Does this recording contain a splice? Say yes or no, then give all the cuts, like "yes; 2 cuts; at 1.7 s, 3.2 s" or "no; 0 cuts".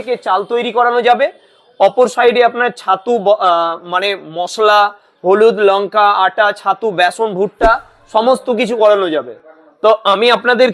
no; 0 cuts